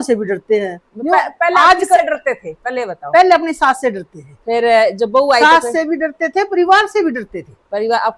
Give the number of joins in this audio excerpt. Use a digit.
0